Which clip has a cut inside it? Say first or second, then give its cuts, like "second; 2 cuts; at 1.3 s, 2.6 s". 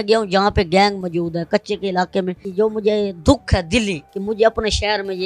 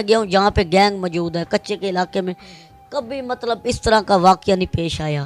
first; 2 cuts; at 2.5 s, 4.1 s